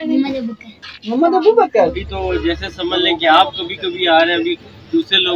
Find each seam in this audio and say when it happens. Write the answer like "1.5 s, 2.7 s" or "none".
2.0 s